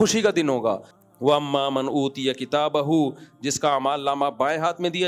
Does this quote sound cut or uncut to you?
cut